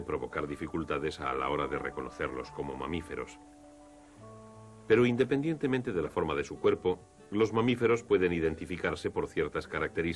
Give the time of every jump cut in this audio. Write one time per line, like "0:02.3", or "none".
0:04.9

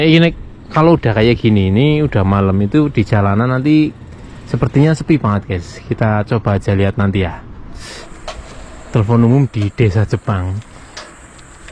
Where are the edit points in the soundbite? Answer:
0:07.8

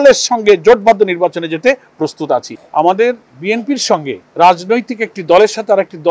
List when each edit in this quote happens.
0:02.5

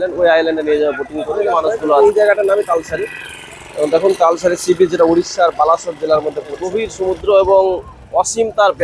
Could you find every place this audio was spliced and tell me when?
0:02.0
0:06.9

